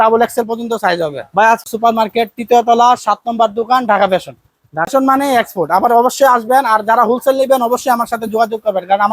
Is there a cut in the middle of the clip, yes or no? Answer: yes